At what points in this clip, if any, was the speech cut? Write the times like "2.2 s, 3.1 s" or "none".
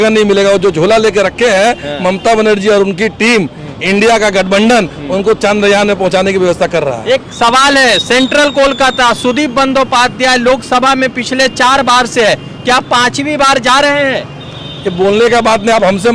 none